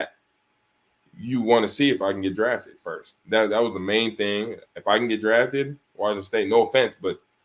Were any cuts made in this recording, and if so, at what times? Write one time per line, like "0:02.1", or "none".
none